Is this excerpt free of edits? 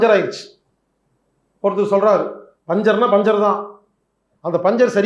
yes; 0 cuts

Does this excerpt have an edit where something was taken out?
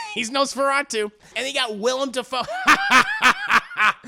yes; 1 cut; at 1.4 s

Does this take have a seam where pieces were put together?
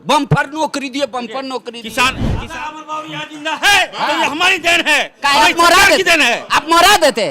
yes; 1 cut; at 2.3 s

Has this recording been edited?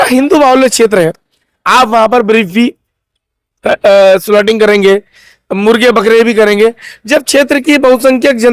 no; 0 cuts

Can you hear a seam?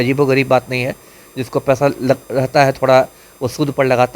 no; 0 cuts

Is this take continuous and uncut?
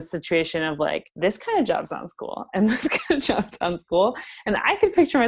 no; 1 cut; at 1.1 s

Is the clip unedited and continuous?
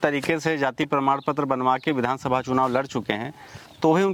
yes; 0 cuts

